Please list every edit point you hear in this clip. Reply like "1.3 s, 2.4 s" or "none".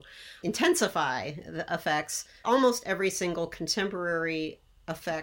none

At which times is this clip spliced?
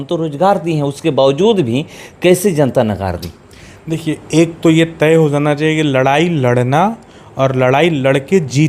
none

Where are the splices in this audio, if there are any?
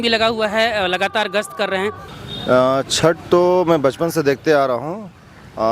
2.0 s

